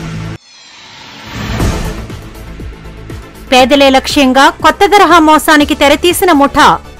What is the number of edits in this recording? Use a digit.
1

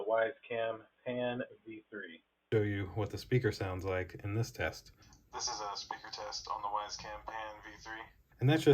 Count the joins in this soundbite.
1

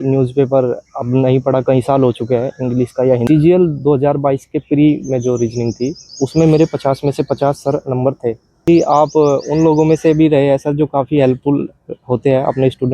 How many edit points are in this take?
2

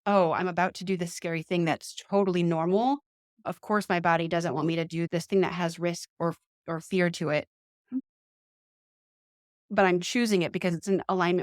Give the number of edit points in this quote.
0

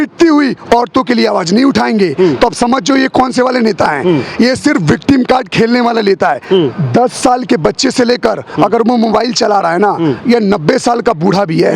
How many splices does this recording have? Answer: 0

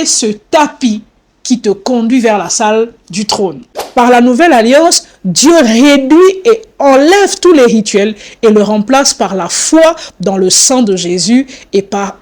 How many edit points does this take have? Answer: 1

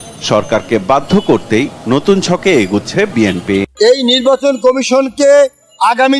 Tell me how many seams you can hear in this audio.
1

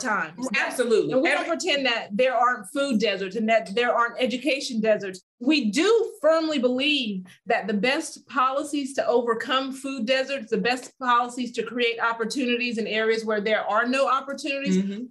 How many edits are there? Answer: 0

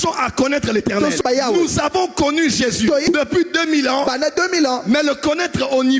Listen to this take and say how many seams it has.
2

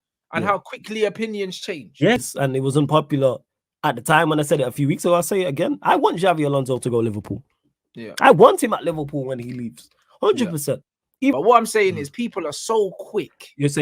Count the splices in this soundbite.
2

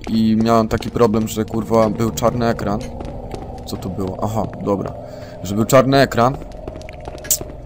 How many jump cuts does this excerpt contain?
0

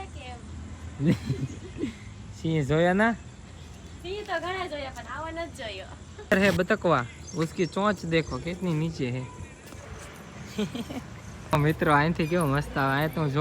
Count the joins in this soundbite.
2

